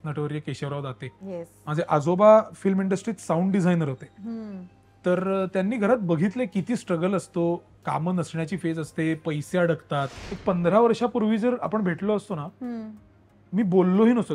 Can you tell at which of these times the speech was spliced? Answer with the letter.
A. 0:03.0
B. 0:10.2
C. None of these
B